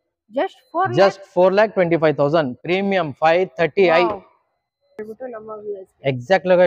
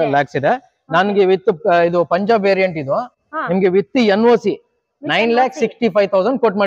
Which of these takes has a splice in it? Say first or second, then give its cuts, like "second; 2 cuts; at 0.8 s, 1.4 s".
first; 1 cut; at 5.0 s